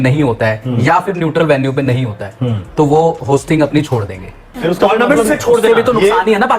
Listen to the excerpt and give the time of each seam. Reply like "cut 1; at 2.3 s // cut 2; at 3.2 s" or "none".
cut 1; at 4.5 s